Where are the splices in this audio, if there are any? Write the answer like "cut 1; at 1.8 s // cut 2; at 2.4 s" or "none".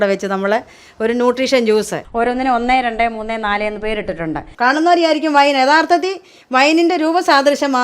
cut 1; at 2.0 s // cut 2; at 4.5 s